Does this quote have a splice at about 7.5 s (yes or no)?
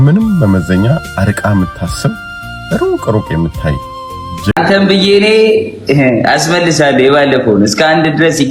no